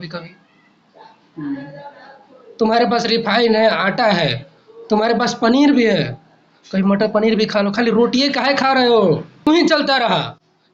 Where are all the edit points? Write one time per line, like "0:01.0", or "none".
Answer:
0:09.5

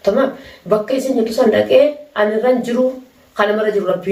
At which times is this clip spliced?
none

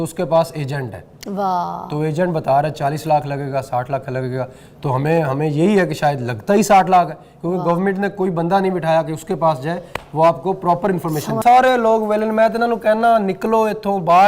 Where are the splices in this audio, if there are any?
0:11.4

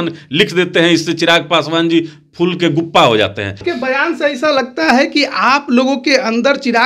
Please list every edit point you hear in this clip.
0:03.6

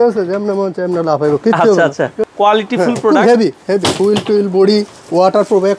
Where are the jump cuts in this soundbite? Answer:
0:02.2

